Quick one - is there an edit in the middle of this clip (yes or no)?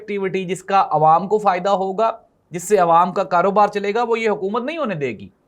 no